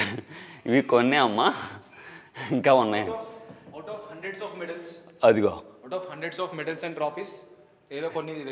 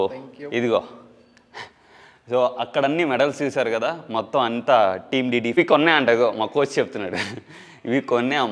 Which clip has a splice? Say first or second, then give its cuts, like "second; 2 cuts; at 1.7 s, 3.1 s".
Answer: second; 1 cut; at 5.5 s